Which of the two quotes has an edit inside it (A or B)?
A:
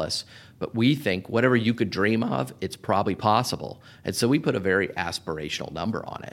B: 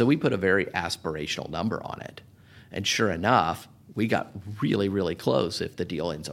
A